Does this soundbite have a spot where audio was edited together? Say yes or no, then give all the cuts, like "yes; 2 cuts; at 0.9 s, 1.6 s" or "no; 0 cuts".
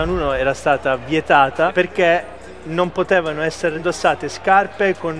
yes; 2 cuts; at 1.7 s, 3.8 s